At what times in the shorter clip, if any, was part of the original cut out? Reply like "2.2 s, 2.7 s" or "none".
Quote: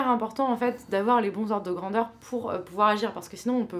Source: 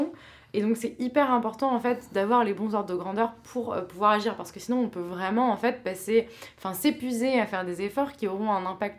none